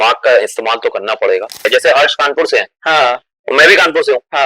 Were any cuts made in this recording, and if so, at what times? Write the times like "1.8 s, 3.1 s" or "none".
1.7 s